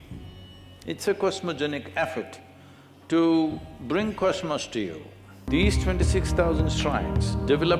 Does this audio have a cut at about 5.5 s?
yes; 1 cut; at 5.5 s

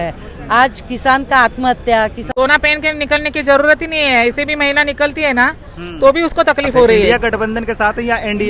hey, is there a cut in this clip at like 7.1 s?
yes; 2 cuts; at 2.2 s, 7.1 s

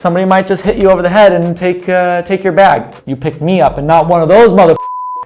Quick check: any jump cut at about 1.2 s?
no; 1 cut; at 3.0 s

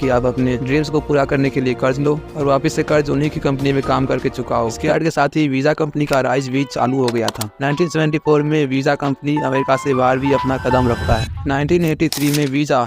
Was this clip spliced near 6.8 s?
no; 2 cuts; at 4.8 s, 11.3 s

